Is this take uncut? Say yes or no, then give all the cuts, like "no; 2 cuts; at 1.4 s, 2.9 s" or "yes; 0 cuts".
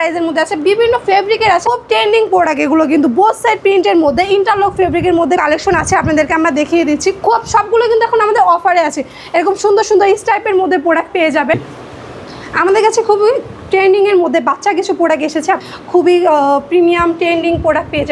no; 4 cuts; at 1.6 s, 5.4 s, 11.6 s, 15.6 s